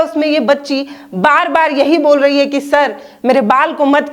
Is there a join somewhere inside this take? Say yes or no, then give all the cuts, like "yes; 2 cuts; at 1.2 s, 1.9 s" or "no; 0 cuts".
no; 0 cuts